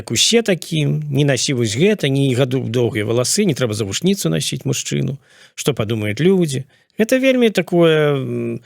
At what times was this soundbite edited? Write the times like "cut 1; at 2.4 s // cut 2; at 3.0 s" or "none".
none